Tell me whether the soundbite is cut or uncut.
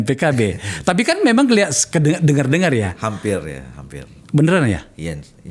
uncut